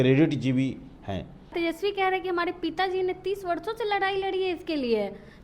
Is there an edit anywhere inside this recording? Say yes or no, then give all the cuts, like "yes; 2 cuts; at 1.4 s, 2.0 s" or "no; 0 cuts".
yes; 1 cut; at 1.5 s